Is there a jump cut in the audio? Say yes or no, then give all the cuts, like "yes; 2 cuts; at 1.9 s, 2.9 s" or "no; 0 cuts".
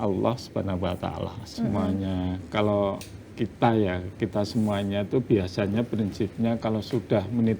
yes; 1 cut; at 1.5 s